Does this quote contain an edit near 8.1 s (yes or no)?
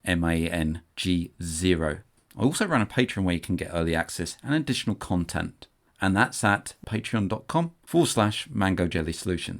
no